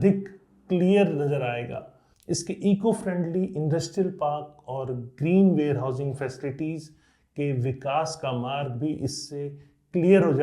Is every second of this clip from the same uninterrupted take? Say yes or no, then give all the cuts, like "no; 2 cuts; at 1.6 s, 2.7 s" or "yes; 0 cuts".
no; 1 cut; at 2.1 s